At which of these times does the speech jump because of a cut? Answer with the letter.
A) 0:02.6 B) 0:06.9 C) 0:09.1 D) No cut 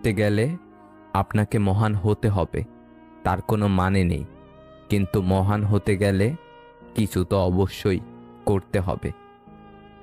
C